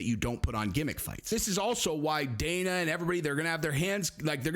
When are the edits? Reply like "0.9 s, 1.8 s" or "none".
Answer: 1.3 s